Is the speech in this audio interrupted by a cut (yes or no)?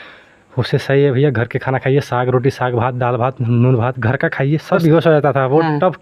yes